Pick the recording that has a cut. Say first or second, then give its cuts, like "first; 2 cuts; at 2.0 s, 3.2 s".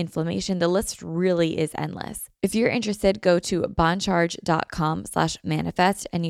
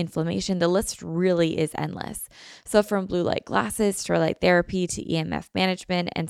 first; 1 cut; at 2.2 s